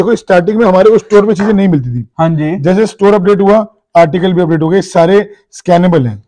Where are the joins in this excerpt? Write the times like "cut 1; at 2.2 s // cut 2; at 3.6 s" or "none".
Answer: none

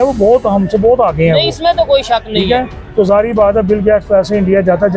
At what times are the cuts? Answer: none

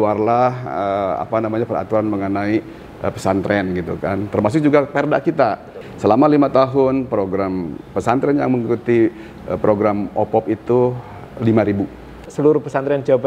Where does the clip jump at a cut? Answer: cut 1; at 5.8 s // cut 2; at 12.2 s

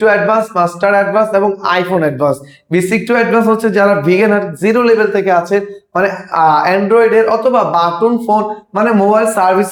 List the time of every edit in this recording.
none

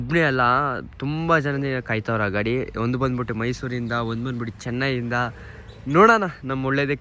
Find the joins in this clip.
none

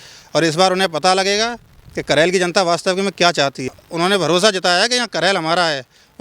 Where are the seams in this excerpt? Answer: cut 1; at 3.6 s

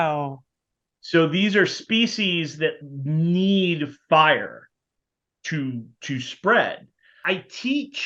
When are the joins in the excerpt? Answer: cut 1; at 7.2 s

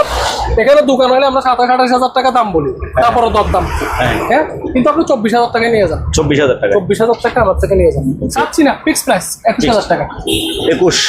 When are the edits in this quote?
cut 1; at 8.3 s

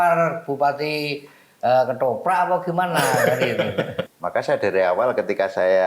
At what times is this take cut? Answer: cut 1; at 4.0 s

